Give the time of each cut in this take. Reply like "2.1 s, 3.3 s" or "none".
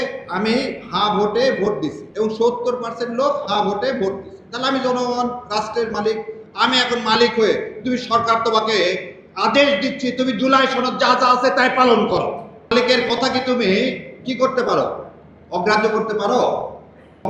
2.0 s, 12.7 s